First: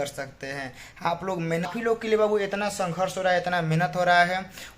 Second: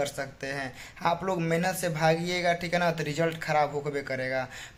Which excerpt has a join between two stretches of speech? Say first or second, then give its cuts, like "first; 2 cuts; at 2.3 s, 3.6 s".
first; 1 cut; at 1.7 s